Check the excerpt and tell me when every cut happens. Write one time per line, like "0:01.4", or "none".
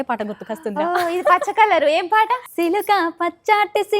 0:02.5